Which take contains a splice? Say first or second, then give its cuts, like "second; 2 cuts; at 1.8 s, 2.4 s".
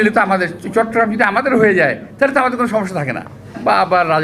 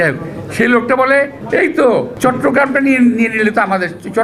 second; 2 cuts; at 1.0 s, 2.1 s